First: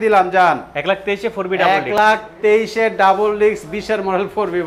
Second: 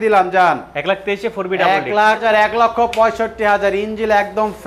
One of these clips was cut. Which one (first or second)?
second